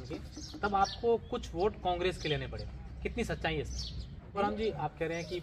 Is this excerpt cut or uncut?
cut